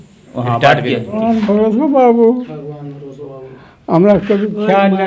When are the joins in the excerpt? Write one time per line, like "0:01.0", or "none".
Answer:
0:01.2